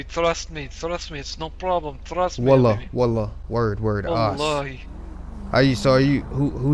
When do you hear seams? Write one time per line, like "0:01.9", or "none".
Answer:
none